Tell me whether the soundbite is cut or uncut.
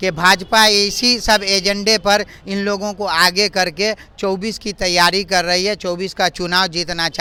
uncut